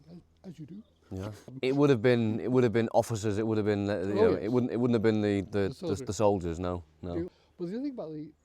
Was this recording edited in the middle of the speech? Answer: yes; 2 cuts; at 1.5 s, 7.3 s

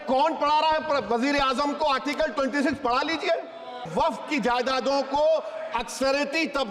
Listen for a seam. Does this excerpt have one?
yes; 1 cut; at 3.9 s

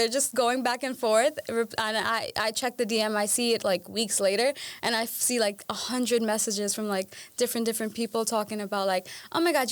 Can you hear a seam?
no; 0 cuts

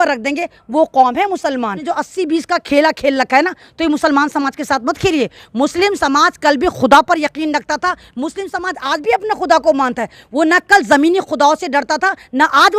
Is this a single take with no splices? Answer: no; 1 cut; at 1.8 s

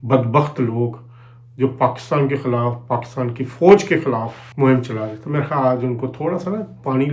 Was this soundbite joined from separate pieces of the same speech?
no; 0 cuts

